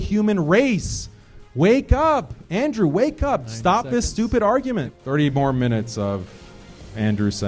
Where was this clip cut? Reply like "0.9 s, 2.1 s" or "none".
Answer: 5.0 s